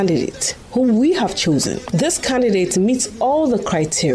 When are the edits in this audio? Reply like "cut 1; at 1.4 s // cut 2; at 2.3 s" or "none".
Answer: none